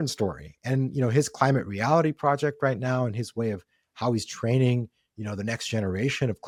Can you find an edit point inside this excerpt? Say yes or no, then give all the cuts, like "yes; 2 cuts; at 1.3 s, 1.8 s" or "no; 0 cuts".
no; 0 cuts